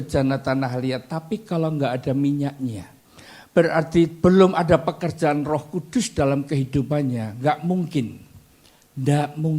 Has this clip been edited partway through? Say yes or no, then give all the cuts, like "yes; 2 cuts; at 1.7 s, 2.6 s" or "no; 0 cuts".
no; 0 cuts